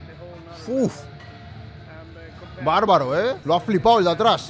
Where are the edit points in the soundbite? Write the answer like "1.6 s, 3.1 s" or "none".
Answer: 3.4 s